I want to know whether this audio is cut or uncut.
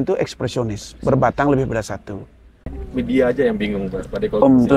cut